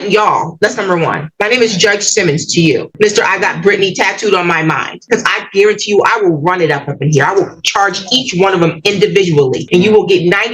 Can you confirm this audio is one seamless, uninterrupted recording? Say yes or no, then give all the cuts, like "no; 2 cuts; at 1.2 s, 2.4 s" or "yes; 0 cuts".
no; 3 cuts; at 2.9 s, 5.0 s, 9.6 s